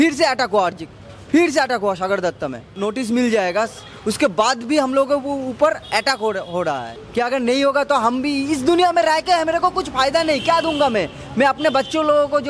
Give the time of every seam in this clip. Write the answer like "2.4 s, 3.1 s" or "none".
2.6 s, 7.0 s